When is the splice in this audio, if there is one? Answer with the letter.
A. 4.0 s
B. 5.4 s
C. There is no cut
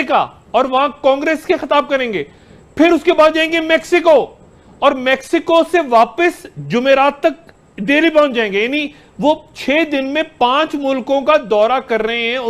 B